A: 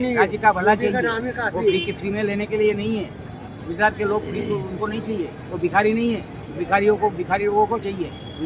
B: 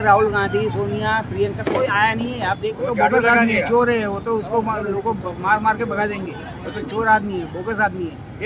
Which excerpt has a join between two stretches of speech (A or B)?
B